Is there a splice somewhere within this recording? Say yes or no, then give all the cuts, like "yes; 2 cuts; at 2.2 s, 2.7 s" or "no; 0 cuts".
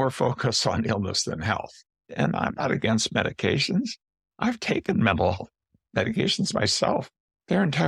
yes; 2 cuts; at 2.1 s, 7.1 s